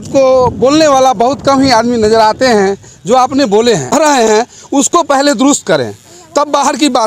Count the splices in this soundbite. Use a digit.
1